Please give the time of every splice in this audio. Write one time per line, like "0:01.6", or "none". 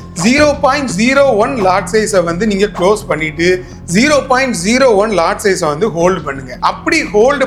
none